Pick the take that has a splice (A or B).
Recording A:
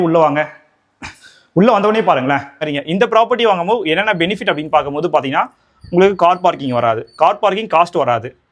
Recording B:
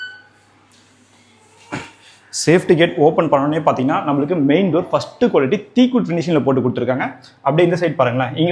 A